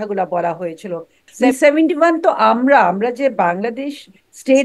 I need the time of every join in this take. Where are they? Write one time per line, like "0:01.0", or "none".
0:01.3